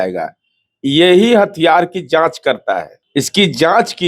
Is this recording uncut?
no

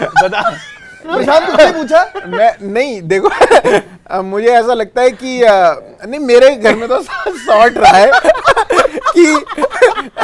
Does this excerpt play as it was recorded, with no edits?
yes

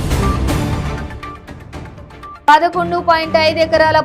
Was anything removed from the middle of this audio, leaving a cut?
no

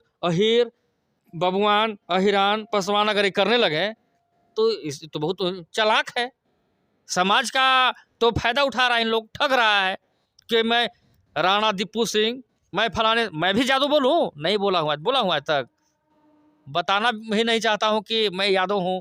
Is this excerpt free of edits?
yes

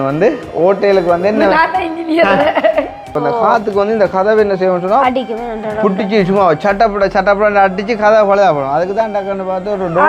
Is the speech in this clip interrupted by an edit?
yes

